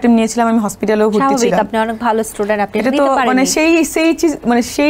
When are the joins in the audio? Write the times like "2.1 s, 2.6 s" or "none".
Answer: none